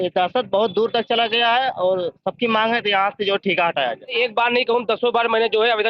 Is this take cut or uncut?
cut